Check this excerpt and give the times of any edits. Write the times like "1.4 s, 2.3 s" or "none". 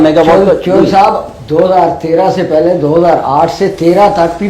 none